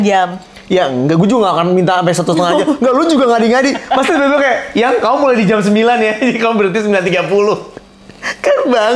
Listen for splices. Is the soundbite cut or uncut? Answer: uncut